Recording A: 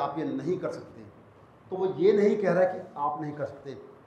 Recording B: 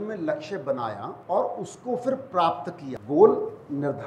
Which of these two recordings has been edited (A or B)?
B